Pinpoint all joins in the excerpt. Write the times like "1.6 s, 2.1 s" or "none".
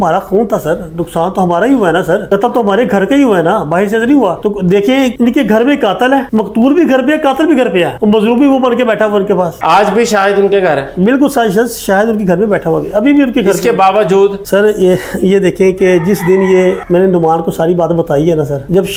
none